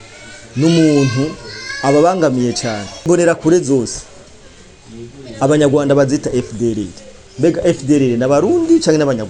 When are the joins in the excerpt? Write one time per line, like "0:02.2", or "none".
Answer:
0:03.1

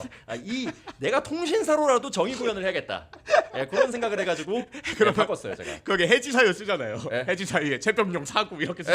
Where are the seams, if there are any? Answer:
none

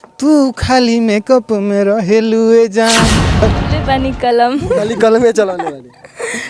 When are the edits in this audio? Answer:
0:03.4

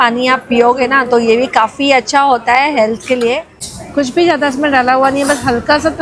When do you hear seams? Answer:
0:03.6

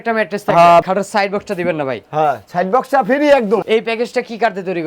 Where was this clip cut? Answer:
0:00.9
0:03.6

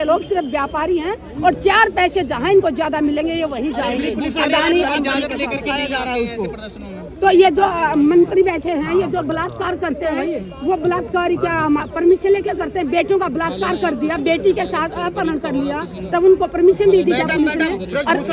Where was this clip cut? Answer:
none

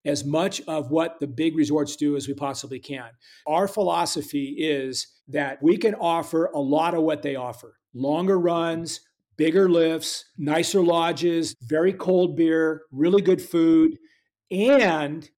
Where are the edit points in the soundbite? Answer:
0:03.4
0:05.6
0:11.6

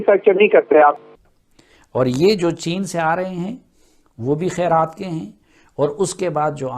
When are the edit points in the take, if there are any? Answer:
0:01.1

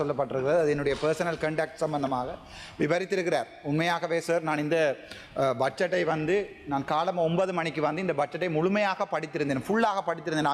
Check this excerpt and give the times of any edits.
none

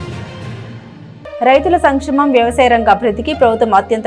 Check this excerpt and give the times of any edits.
0:01.4

